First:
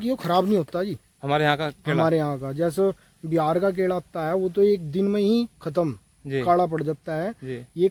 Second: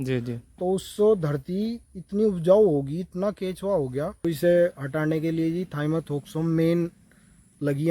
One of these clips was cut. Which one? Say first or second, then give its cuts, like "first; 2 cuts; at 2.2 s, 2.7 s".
second; 1 cut; at 4.2 s